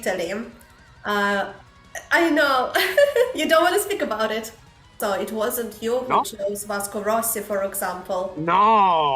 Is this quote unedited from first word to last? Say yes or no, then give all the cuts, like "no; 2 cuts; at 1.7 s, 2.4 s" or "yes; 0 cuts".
no; 1 cut; at 4.9 s